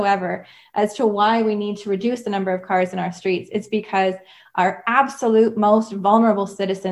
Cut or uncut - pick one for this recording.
uncut